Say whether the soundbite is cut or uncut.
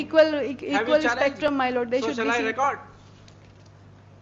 uncut